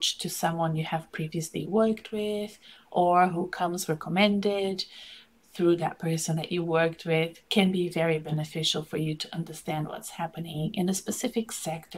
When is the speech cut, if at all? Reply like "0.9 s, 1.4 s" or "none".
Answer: none